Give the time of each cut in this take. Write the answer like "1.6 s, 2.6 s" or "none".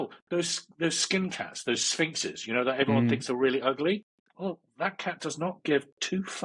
4.1 s